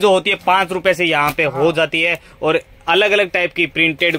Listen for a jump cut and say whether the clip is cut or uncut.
uncut